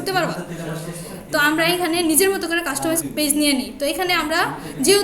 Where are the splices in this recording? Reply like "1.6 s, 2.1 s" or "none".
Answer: 3.0 s